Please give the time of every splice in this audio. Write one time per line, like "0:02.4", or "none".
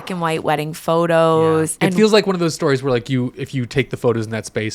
0:01.7

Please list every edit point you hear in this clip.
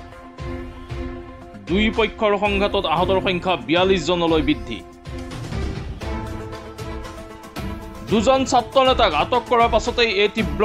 0:01.6
0:04.6
0:08.0

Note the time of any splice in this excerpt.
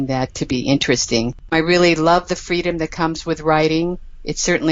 0:01.4

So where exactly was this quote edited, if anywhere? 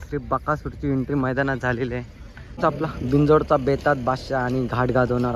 0:02.6

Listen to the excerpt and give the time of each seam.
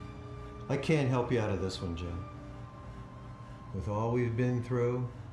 none

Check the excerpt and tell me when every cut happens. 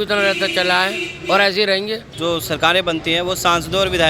0:02.1

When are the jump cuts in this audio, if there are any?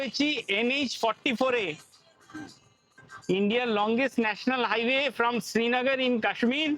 0:03.0

